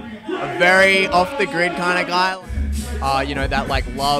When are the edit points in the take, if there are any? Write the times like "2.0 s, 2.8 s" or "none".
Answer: 2.3 s